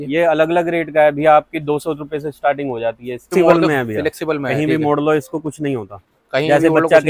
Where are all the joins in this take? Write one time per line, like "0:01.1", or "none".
0:03.3